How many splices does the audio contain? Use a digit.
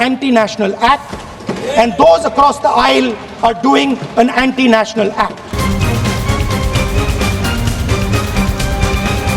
1